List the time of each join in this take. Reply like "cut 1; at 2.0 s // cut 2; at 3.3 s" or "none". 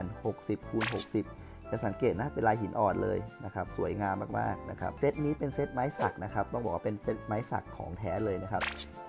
cut 1; at 4.9 s